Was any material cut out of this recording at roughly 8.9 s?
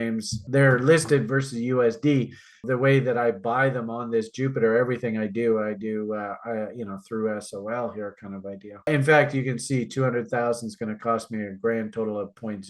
yes; 2 cuts; at 2.6 s, 8.9 s

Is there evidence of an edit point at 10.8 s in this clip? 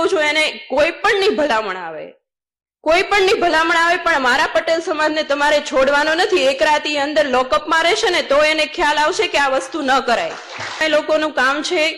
yes; 1 cut; at 10.8 s

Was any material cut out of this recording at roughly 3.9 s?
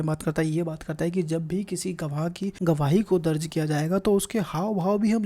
no; 1 cut; at 2.5 s

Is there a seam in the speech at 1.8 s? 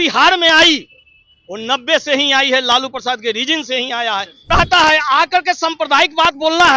no; 1 cut; at 4.3 s

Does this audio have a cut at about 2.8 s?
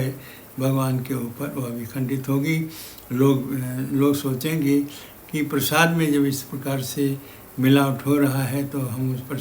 no; 0 cuts

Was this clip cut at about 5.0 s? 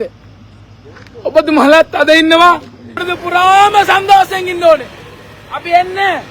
no; 1 cut; at 3.1 s

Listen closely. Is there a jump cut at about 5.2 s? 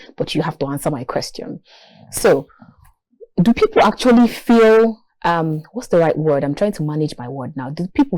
no; 0 cuts

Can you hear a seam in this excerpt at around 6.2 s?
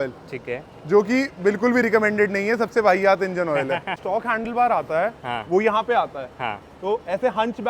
no; 1 cut; at 4.0 s

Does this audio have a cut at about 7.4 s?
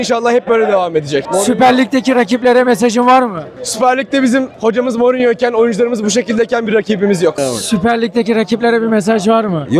yes; 2 cuts; at 1.2 s, 7.4 s

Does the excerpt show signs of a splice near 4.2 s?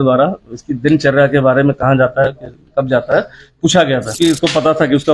yes; 1 cut; at 4.2 s

